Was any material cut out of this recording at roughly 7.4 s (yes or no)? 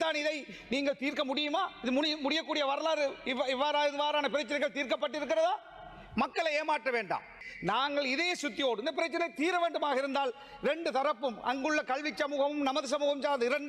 yes